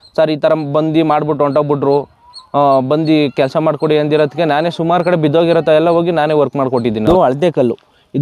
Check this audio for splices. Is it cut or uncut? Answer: cut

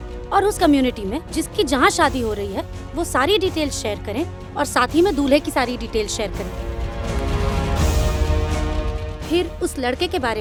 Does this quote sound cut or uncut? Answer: uncut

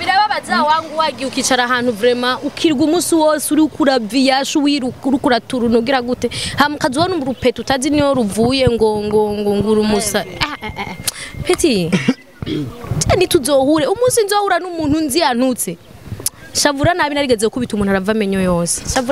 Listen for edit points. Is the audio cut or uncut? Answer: uncut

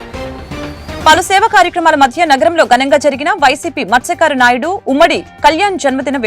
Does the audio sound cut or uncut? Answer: cut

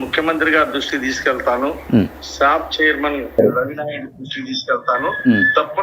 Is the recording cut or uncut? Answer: uncut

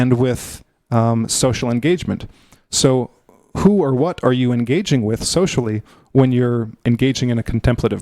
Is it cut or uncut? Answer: cut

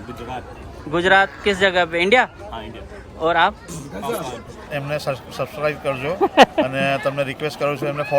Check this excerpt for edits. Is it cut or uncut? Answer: cut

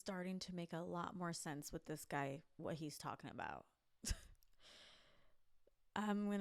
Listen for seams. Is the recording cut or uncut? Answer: uncut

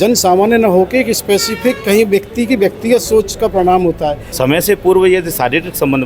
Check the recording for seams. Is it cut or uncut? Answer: cut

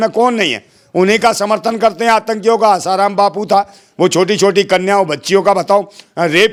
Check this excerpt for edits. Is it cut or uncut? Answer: uncut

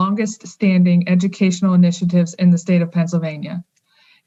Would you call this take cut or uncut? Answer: uncut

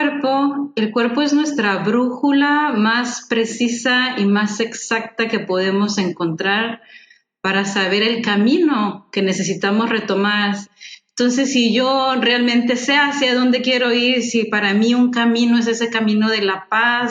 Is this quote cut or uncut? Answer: cut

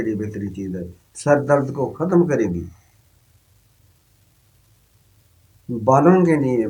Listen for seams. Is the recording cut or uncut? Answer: uncut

